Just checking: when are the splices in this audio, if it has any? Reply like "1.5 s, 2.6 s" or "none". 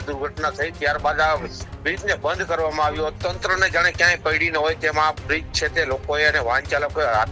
3.1 s